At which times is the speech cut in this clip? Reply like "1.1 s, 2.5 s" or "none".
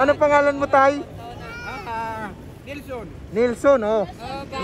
none